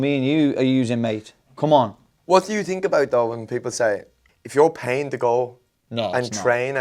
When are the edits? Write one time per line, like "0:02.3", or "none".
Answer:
0:02.1
0:04.1